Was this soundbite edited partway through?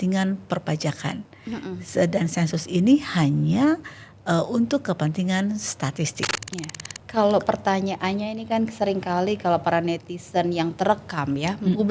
yes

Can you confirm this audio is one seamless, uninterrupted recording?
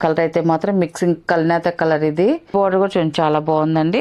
no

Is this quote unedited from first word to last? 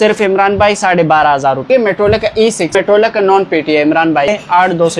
no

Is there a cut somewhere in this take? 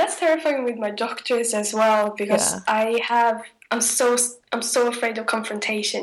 no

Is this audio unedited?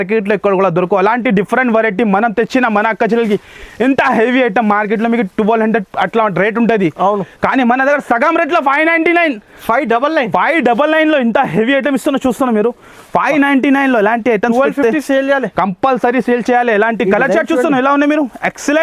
yes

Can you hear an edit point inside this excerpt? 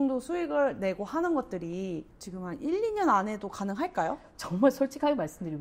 no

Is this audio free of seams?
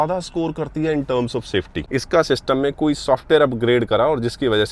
no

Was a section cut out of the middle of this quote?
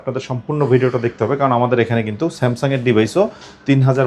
no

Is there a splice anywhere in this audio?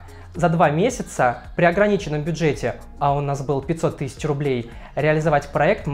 no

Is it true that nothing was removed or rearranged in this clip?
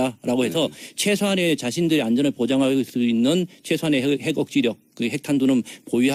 yes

